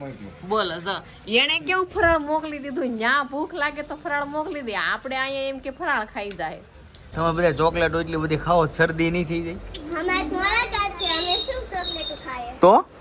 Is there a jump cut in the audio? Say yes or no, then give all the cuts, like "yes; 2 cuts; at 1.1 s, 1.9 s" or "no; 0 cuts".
yes; 1 cut; at 7.0 s